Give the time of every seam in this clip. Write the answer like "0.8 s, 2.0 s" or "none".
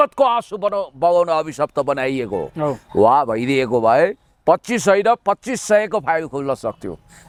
none